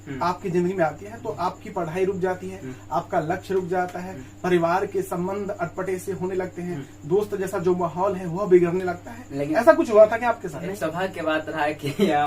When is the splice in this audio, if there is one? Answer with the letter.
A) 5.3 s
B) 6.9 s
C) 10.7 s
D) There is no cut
C